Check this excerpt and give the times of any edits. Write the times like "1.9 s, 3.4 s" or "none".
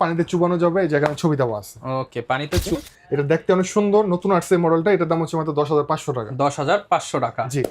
2.8 s